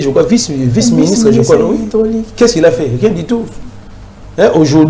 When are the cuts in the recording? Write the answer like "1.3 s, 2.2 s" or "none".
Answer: none